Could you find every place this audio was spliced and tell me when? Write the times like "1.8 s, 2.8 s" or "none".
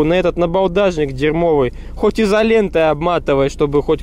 none